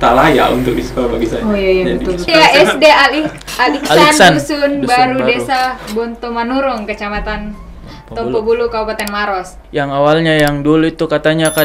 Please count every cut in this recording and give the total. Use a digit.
2